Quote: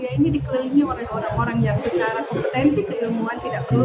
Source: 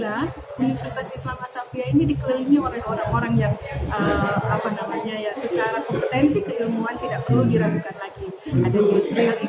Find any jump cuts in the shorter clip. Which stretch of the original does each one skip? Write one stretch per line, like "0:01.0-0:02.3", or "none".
0:03.6-0:05.4